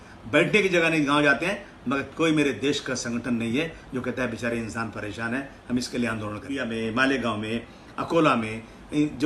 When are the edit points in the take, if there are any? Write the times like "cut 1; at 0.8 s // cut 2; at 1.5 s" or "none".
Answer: cut 1; at 6.5 s